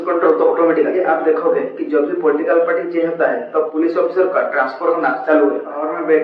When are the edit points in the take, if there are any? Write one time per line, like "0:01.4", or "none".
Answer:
none